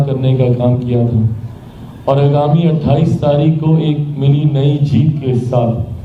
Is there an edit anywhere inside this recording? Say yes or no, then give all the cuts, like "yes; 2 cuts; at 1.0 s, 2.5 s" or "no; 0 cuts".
no; 0 cuts